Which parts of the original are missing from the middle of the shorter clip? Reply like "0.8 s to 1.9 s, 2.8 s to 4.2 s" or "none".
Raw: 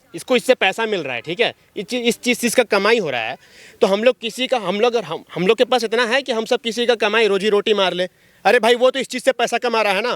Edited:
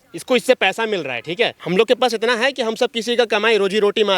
1.6 s to 5.3 s